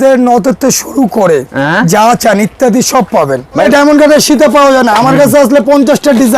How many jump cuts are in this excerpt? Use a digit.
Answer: 1